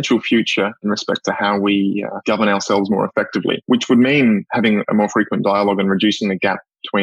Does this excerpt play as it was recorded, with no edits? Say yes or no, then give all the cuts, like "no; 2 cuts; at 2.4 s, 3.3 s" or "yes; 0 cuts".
no; 3 cuts; at 0.8 s, 2.1 s, 3.6 s